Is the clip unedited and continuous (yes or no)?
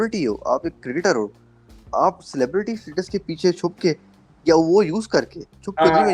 yes